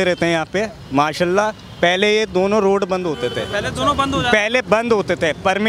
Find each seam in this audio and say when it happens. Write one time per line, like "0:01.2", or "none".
none